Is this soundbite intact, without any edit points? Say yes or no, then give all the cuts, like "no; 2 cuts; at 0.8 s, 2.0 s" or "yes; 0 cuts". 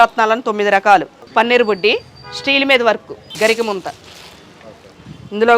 no; 2 cuts; at 1.2 s, 3.2 s